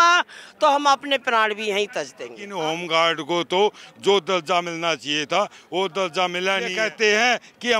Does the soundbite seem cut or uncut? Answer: cut